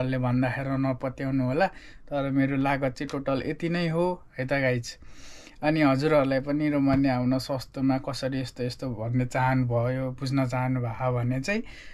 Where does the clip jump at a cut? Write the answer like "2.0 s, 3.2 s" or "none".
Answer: none